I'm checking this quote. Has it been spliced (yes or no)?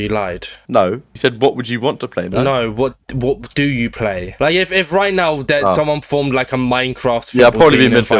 no